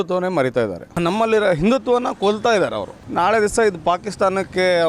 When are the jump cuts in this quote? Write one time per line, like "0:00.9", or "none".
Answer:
0:01.0
0:03.0